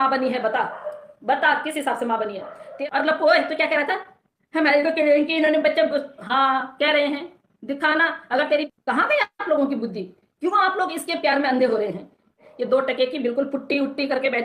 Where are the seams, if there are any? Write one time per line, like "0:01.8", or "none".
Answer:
0:02.7
0:08.7
0:12.5